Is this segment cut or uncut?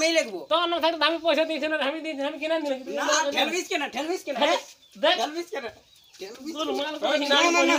uncut